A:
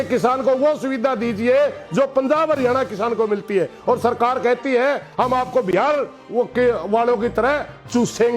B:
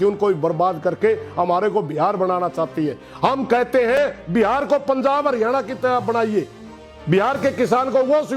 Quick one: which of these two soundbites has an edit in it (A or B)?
A